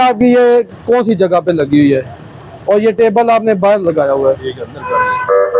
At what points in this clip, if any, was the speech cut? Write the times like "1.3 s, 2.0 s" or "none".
none